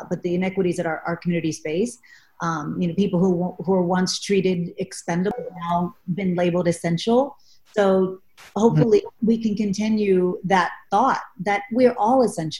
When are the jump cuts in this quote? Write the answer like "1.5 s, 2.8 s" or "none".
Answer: 5.3 s, 9.1 s